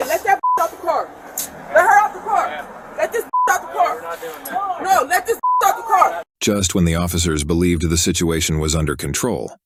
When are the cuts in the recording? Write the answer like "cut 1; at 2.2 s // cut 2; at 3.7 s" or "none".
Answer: none

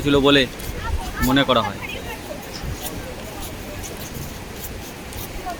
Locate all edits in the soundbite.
none

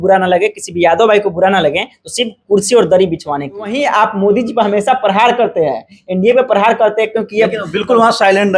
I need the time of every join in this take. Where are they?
cut 1; at 3.7 s

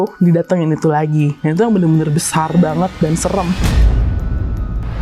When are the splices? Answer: none

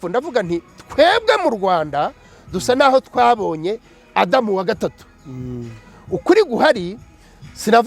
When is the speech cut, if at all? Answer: none

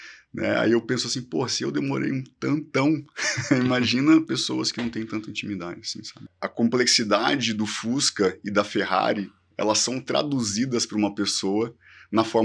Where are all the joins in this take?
cut 1; at 6.4 s

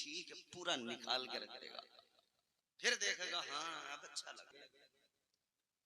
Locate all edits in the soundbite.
cut 1; at 4.5 s

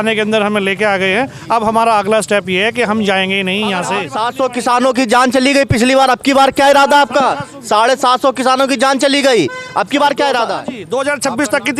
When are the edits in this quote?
cut 1; at 4.0 s // cut 2; at 10.7 s

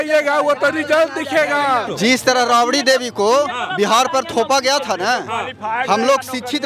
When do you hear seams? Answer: cut 1; at 1.9 s

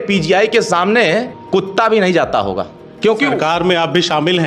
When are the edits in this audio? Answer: cut 1; at 1.4 s // cut 2; at 2.8 s

